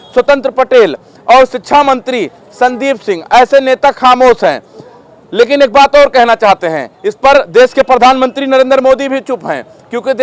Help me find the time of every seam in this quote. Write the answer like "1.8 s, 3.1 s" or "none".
none